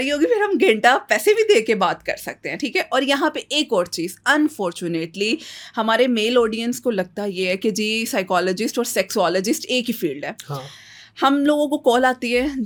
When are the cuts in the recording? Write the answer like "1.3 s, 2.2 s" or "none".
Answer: none